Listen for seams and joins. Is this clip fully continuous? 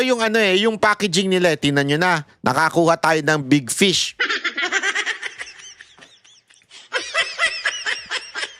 yes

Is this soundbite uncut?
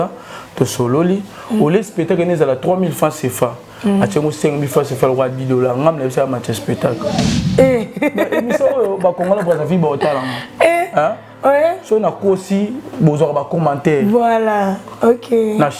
no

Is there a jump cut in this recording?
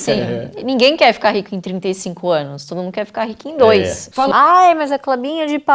yes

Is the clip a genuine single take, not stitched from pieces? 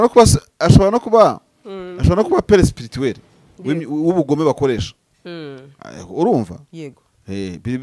yes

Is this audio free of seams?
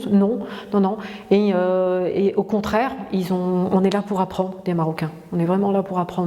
yes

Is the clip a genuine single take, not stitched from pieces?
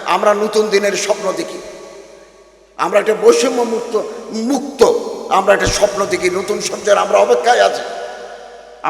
yes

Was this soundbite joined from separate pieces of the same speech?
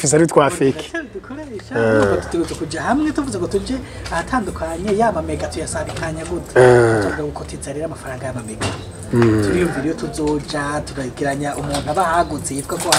no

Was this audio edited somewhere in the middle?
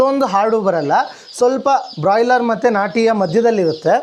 no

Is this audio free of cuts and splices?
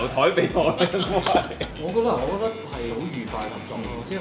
no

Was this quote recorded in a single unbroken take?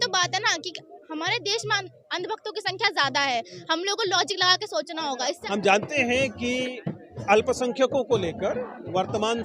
no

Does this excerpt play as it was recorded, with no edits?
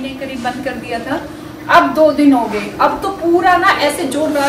yes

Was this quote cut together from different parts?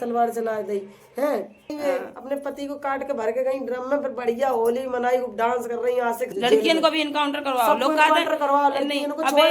yes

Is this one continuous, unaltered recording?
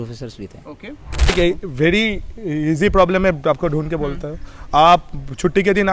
no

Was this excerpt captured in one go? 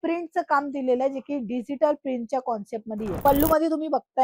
no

